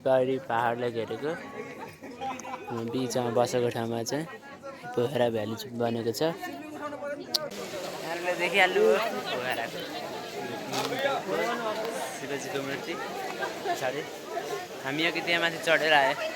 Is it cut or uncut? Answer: cut